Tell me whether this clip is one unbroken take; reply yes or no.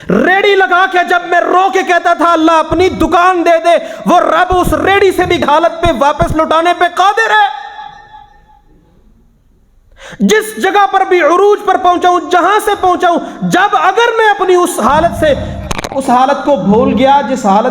no